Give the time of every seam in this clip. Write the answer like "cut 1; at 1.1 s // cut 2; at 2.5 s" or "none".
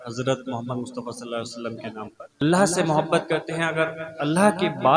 cut 1; at 2.4 s